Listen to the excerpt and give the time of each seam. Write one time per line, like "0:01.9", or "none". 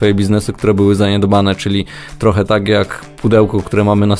none